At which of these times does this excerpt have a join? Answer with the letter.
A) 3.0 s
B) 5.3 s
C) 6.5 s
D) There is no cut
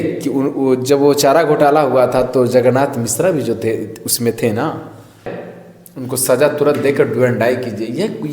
B